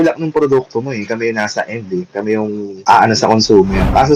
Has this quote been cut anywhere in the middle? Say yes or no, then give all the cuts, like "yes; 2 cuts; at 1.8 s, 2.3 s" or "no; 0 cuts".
no; 0 cuts